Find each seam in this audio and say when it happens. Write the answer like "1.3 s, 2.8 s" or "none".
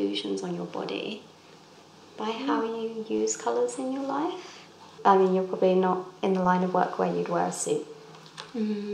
4.9 s